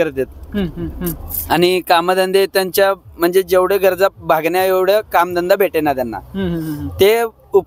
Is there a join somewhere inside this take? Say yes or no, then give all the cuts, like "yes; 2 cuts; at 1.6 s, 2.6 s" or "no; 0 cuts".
no; 0 cuts